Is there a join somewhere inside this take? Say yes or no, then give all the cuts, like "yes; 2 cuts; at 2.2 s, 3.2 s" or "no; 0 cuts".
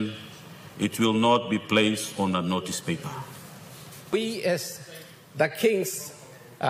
yes; 1 cut; at 4.1 s